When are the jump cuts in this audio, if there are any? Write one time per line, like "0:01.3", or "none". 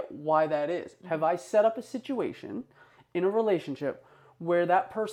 none